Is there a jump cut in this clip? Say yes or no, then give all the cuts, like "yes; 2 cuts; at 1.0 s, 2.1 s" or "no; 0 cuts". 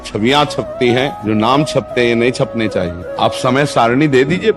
yes; 2 cuts; at 1.2 s, 3.0 s